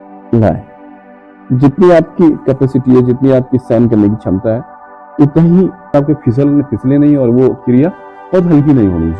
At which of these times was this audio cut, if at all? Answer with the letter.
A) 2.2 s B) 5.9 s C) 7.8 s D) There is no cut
B